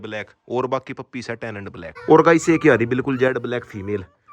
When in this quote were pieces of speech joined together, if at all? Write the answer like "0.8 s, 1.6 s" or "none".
1.9 s

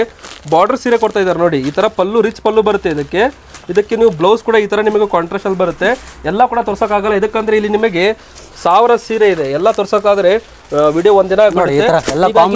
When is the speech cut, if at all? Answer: none

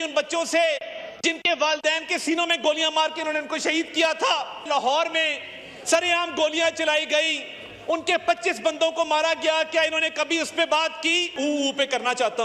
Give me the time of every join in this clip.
4.5 s, 11.3 s

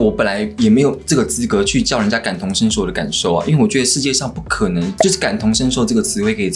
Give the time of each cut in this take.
none

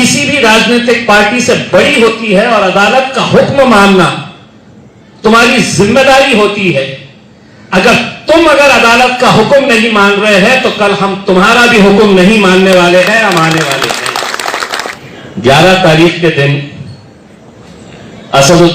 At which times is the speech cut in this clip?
15.0 s

